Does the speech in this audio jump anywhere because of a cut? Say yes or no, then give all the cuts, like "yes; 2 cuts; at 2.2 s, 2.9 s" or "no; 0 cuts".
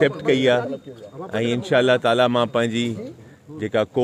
no; 0 cuts